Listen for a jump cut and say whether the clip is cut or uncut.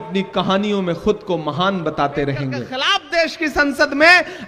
cut